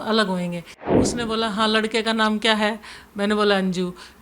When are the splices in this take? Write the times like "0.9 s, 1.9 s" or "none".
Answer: 1.0 s